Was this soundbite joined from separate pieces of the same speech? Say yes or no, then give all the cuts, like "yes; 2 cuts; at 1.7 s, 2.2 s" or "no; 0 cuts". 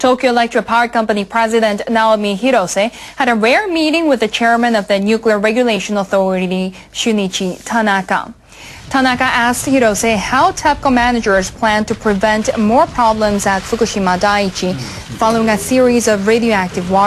no; 0 cuts